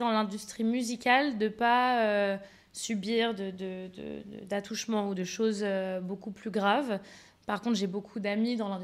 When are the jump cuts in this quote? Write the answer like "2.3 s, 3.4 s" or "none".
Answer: none